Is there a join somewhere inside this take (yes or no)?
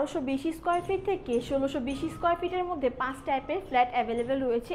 no